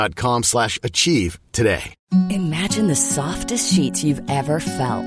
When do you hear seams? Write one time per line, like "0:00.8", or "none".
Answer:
0:01.9